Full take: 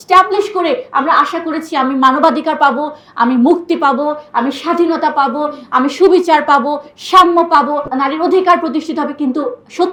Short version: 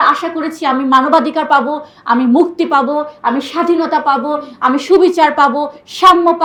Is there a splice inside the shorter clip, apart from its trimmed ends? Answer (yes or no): no